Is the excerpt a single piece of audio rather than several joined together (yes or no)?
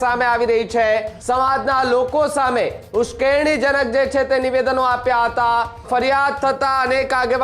no